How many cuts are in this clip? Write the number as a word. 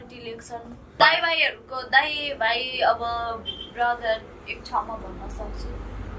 one